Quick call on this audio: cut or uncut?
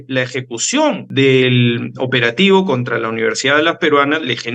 cut